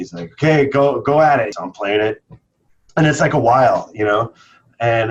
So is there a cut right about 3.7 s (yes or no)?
no